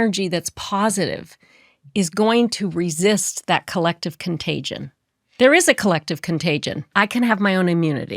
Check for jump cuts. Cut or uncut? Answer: cut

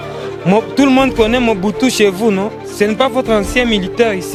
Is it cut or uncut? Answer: uncut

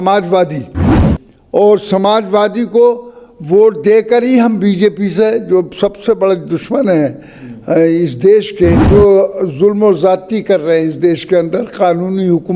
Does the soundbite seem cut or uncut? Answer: cut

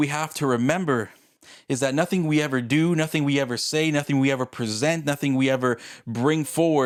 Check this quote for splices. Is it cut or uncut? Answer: uncut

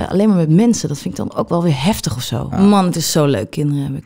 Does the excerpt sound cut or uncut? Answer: cut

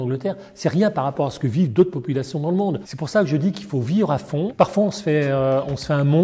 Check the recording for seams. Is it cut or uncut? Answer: cut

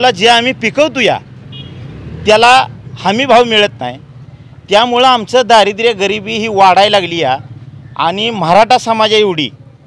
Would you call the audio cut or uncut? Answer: uncut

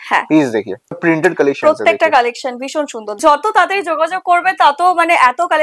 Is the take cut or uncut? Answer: cut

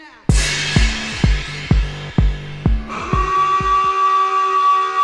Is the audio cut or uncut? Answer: uncut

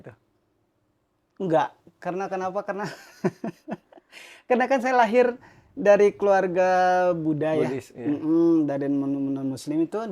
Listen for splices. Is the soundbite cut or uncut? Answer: uncut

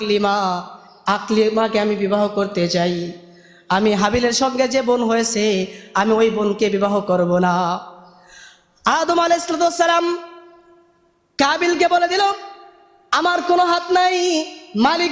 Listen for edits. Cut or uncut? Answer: uncut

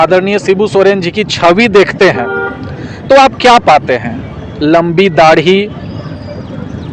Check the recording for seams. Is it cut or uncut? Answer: uncut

